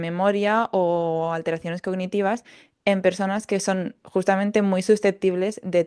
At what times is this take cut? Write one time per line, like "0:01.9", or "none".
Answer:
none